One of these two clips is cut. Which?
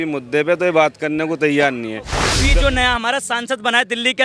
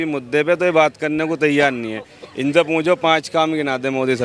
first; 1 cut; at 2.4 s

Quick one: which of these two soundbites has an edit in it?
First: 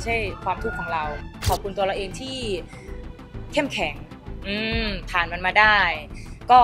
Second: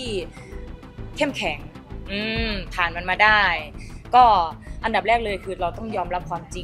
first; 1 cut; at 1.4 s

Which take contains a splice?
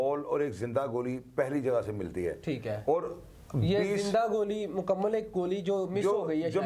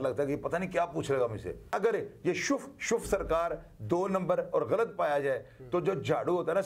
second; 1 cut; at 1.7 s

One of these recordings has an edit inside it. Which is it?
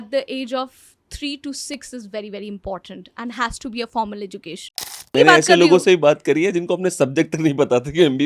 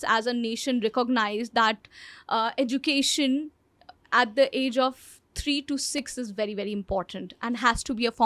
first; 1 cut; at 5.1 s

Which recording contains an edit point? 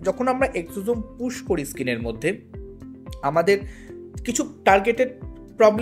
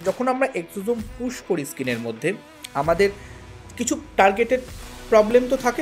second; 1 cut; at 2.5 s

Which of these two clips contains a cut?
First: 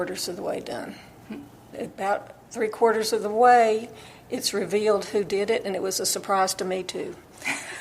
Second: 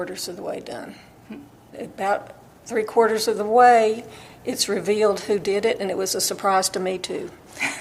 first; 1 cut; at 2.4 s

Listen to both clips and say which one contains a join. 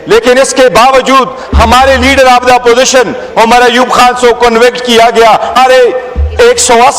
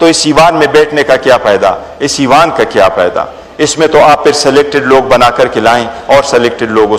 first; 1 cut; at 5.5 s

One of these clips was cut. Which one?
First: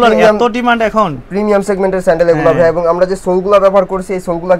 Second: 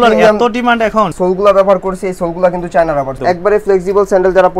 second; 2 cuts; at 1.1 s, 3.1 s

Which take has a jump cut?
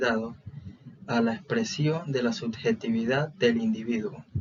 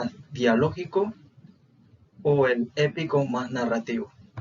second; 1 cut; at 3.2 s

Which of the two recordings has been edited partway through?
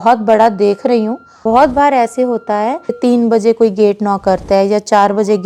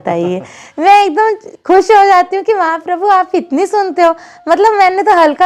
first; 2 cuts; at 1.3 s, 3.0 s

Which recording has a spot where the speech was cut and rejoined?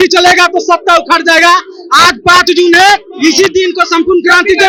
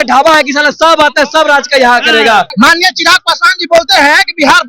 second; 1 cut; at 2.5 s

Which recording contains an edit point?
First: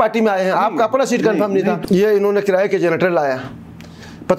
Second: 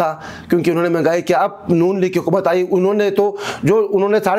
first; 1 cut; at 1.8 s

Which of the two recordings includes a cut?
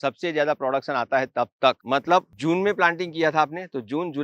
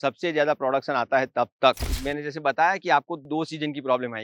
second; 2 cuts; at 1.9 s, 3.2 s

